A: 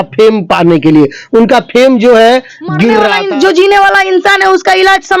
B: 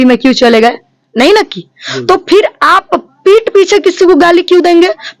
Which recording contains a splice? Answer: A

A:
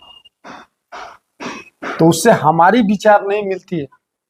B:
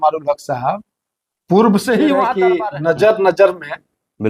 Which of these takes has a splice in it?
B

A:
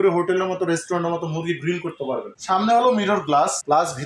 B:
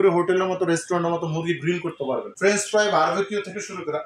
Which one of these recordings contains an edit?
A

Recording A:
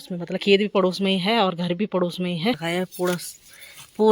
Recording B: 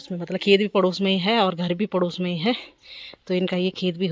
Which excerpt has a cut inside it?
A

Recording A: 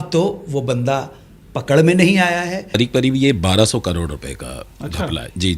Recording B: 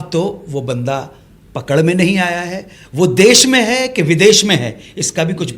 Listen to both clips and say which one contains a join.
A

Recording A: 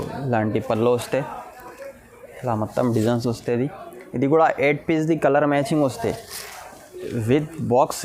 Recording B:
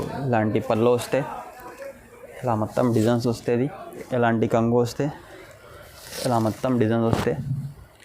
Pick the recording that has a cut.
B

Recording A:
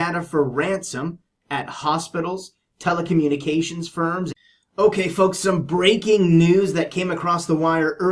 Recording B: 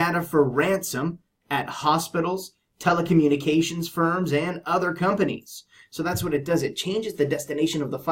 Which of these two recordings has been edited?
B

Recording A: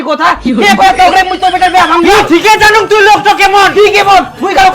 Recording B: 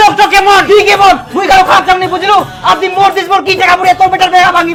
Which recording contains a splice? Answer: A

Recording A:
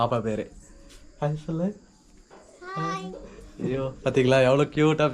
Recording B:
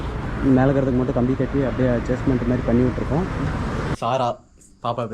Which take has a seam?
B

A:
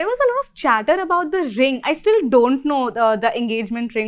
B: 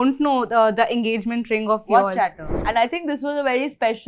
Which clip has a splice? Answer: B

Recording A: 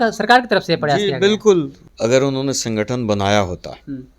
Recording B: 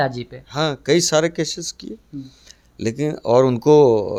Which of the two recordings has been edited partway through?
A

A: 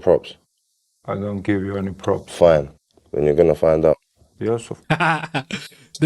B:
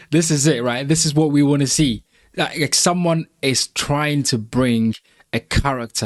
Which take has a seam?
A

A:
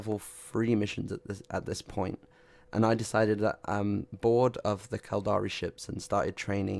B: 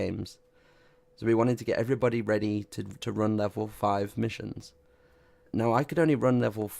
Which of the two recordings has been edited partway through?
B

